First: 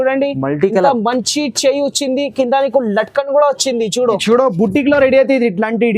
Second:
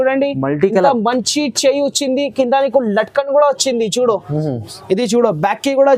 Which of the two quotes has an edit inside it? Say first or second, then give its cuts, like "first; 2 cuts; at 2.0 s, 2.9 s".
first; 1 cut; at 4.2 s